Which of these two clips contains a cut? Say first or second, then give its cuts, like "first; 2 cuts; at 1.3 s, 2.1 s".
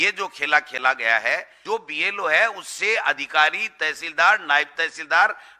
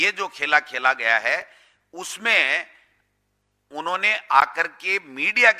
first; 1 cut; at 1.5 s